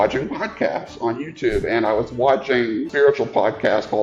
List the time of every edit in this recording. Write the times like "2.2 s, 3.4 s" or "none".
2.9 s